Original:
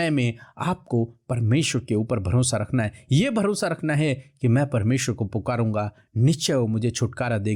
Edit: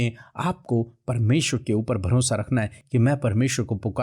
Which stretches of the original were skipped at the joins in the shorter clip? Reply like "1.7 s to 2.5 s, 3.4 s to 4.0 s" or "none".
3.0 s to 4.3 s